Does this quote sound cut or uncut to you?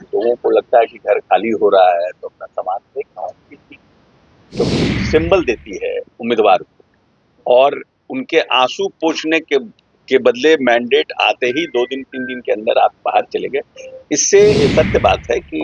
cut